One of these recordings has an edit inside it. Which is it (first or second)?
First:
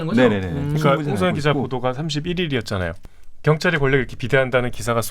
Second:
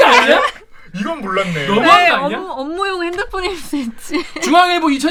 first